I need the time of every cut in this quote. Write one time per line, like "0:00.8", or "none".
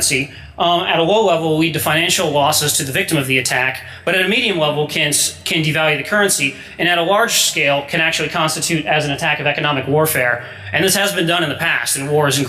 0:10.3